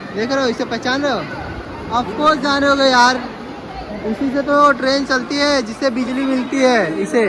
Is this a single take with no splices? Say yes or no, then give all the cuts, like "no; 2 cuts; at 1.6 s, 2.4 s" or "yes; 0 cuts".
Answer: yes; 0 cuts